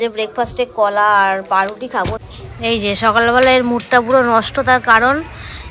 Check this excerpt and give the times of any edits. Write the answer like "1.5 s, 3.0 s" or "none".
2.2 s